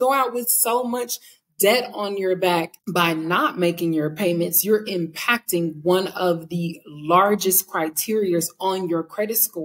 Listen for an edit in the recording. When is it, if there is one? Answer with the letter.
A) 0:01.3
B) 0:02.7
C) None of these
B